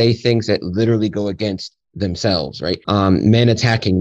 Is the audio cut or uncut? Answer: cut